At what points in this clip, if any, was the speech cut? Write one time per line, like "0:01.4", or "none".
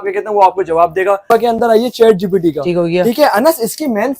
0:01.3